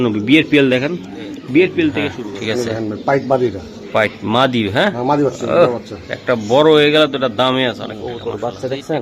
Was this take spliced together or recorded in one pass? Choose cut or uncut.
cut